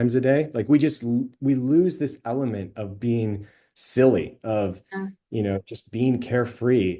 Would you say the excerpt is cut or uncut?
uncut